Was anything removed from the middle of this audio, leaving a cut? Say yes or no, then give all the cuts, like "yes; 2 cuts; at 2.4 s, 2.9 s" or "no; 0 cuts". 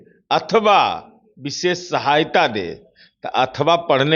no; 0 cuts